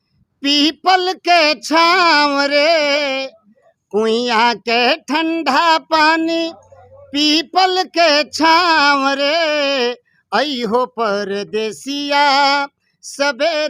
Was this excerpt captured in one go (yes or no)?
yes